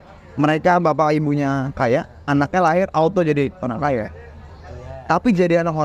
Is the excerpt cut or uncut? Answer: uncut